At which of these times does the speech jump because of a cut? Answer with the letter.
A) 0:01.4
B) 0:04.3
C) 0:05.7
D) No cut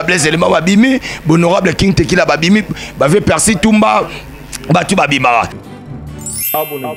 C